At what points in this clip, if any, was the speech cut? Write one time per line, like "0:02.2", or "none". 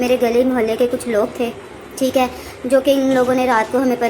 0:01.6